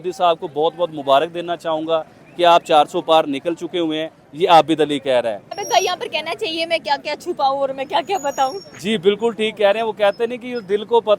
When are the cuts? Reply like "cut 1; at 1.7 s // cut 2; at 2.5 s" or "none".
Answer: cut 1; at 5.6 s